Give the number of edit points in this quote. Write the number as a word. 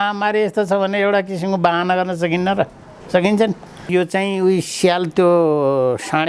one